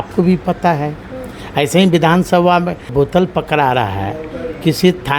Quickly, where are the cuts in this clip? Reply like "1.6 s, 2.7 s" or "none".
2.9 s